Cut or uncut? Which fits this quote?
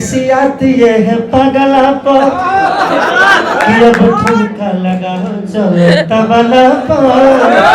uncut